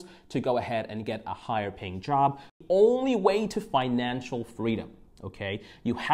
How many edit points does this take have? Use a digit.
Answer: 1